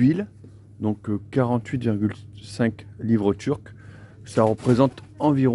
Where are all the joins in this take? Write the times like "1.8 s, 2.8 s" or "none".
none